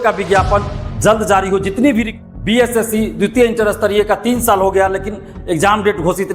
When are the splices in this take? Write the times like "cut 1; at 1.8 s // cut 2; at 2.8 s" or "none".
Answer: cut 1; at 2.2 s